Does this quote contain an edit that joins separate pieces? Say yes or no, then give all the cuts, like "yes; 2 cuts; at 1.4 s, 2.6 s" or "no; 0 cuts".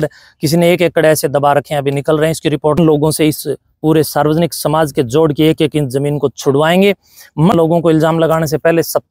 yes; 2 cuts; at 2.8 s, 7.5 s